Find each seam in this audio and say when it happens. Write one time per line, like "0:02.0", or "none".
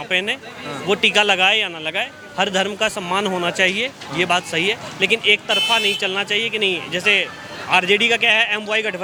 none